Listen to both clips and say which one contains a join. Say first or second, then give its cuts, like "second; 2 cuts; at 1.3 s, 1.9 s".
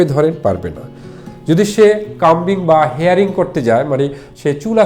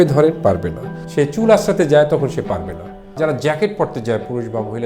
second; 2 cuts; at 1.0 s, 3.2 s